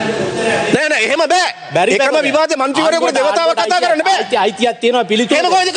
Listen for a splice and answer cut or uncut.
uncut